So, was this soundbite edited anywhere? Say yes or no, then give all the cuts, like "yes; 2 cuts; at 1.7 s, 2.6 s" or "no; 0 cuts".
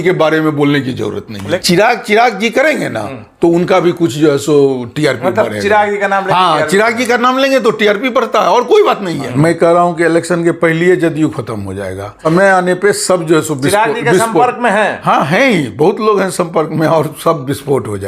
yes; 3 cuts; at 1.6 s, 9.3 s, 12.2 s